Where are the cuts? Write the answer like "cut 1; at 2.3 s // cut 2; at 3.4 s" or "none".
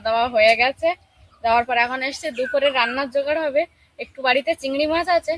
none